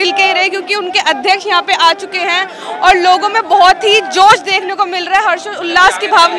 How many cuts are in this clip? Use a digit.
0